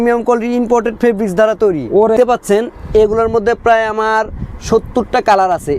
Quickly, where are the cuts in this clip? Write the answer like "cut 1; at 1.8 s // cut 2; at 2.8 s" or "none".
cut 1; at 2.1 s

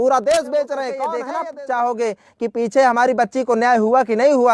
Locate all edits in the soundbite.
cut 1; at 1.2 s

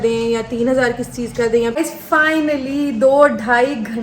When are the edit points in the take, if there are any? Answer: cut 1; at 1.7 s

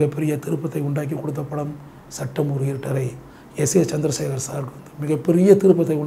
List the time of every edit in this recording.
none

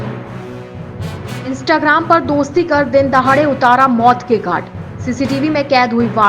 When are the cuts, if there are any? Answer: cut 1; at 1.3 s

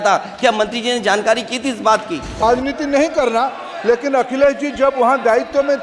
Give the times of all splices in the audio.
cut 1; at 2.4 s

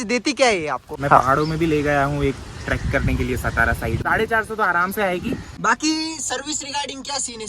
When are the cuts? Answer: cut 1; at 1.0 s // cut 2; at 4.0 s // cut 3; at 5.5 s

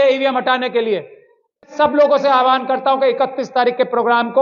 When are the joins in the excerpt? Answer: cut 1; at 1.7 s

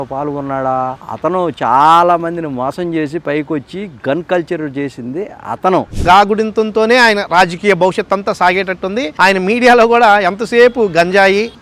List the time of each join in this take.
cut 1; at 6.0 s // cut 2; at 9.1 s

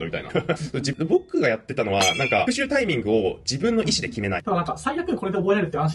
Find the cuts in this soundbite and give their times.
cut 1; at 0.9 s // cut 2; at 4.4 s

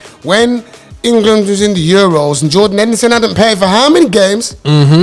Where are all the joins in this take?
none

